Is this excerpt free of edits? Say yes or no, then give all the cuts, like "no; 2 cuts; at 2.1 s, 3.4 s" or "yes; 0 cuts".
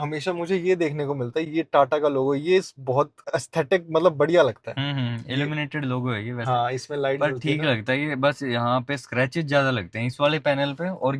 yes; 0 cuts